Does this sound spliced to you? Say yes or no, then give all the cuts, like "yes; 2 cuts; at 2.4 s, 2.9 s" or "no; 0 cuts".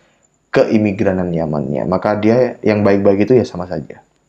no; 0 cuts